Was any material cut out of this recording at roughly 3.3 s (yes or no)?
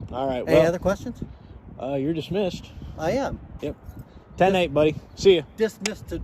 no